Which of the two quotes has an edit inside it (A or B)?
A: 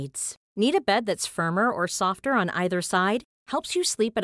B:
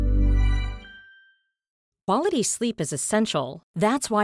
B